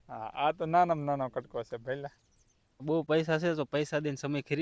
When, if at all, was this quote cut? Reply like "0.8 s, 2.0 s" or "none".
2.8 s

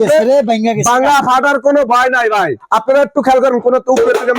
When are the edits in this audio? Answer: 2.6 s

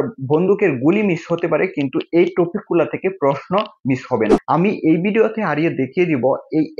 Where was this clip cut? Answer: 4.4 s

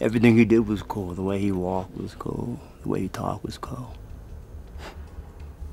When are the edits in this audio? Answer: none

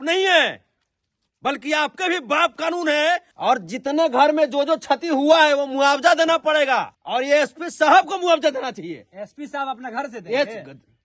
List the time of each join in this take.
3.3 s, 7.0 s

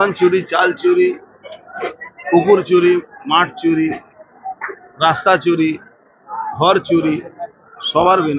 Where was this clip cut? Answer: none

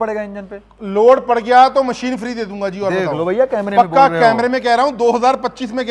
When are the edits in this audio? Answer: none

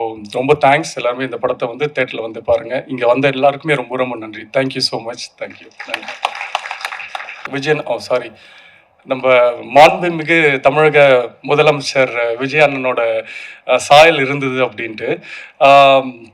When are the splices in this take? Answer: 7.5 s

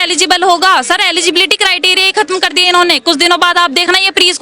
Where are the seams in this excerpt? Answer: none

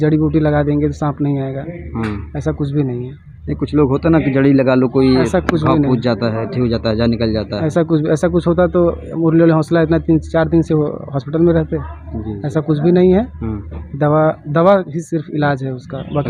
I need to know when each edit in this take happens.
none

